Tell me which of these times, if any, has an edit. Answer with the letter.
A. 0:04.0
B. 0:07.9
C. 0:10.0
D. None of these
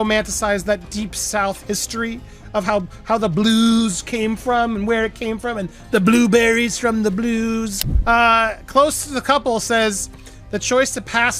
B